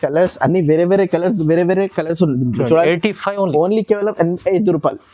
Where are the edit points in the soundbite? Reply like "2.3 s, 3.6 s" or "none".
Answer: none